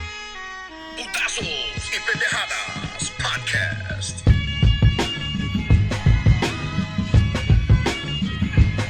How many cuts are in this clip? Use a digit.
0